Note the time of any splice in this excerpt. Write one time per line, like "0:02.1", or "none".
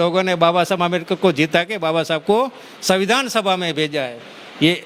none